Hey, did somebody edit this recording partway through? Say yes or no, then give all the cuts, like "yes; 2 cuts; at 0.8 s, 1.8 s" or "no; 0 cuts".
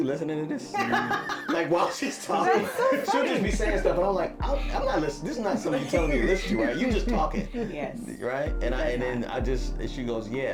no; 0 cuts